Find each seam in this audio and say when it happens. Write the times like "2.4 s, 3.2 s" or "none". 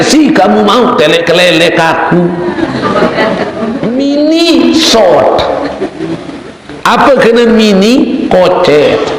3.8 s